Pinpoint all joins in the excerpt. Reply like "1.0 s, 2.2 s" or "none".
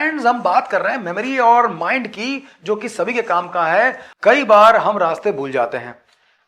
4.1 s

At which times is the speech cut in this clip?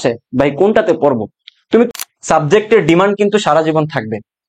1.9 s

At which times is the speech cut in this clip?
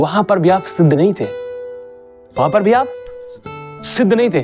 none

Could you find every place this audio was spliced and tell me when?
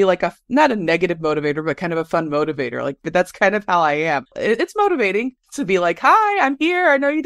none

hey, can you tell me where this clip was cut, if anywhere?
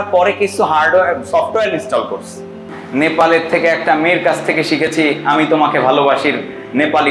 2.7 s

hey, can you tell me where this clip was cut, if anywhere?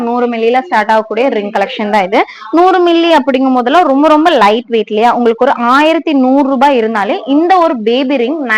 none

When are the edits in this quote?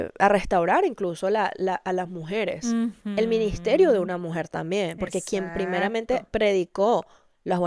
none

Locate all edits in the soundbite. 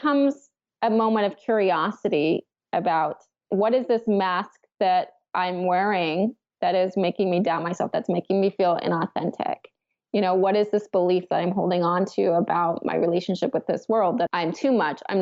14.3 s

